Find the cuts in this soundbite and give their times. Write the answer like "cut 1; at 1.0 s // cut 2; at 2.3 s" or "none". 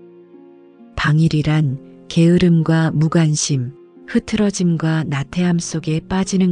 cut 1; at 0.9 s